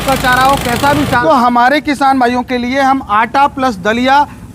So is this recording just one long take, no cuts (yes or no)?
no